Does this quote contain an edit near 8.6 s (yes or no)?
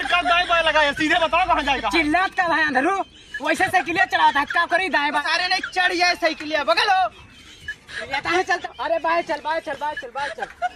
yes